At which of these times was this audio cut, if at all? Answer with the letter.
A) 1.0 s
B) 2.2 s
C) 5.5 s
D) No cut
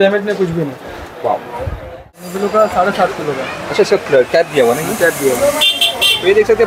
B